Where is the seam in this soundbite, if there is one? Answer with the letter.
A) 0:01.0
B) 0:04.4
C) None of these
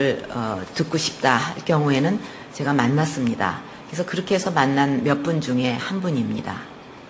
B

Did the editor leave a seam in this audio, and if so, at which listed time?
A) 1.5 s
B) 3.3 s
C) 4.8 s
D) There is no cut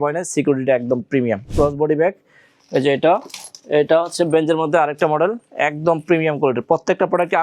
A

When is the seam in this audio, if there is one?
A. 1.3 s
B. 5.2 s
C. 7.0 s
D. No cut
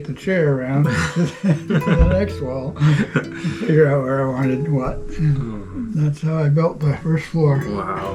C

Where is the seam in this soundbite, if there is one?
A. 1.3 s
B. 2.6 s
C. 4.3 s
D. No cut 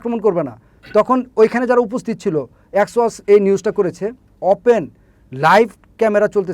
C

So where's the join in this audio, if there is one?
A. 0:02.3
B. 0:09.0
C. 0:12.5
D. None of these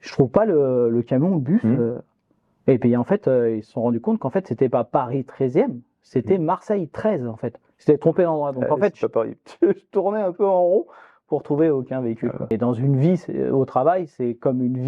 C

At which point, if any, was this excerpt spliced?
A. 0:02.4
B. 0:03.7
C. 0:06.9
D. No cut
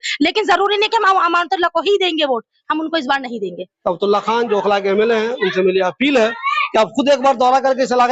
B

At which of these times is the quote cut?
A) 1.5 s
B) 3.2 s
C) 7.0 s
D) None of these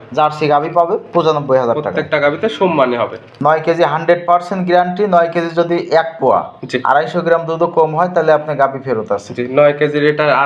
B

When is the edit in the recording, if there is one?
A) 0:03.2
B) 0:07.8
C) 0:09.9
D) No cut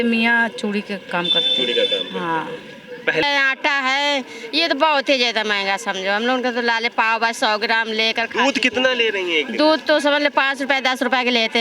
A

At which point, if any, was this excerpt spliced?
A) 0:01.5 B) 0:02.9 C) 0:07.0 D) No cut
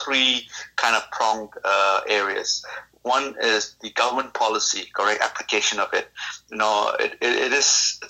D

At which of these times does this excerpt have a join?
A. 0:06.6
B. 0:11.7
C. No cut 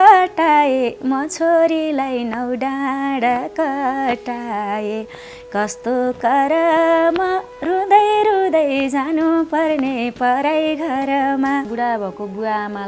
B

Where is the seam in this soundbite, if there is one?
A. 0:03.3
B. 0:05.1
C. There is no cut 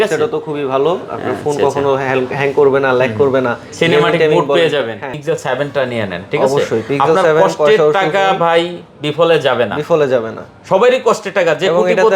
B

